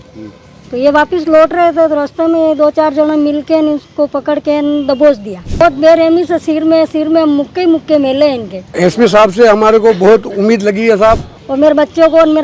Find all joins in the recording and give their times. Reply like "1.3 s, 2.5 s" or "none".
5.6 s, 8.7 s, 11.4 s